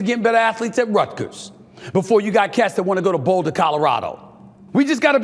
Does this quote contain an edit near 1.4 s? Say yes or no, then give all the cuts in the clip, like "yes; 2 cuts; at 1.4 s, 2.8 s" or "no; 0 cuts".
no; 0 cuts